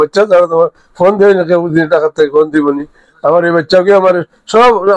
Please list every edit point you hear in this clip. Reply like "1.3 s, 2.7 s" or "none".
none